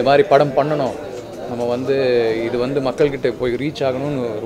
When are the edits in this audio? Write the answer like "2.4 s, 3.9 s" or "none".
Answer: none